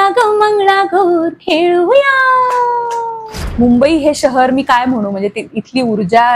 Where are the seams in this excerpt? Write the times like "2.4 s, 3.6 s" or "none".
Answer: 3.3 s